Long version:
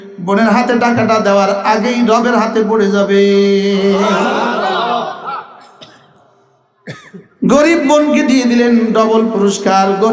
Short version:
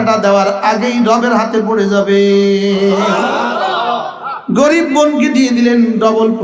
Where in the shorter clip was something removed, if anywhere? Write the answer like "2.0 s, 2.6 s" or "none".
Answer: 4.3 s